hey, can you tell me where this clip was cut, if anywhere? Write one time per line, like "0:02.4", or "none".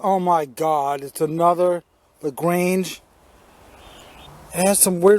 0:04.3